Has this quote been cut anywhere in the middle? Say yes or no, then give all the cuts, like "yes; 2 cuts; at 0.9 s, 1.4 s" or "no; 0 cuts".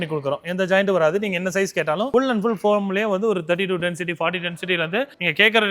no; 0 cuts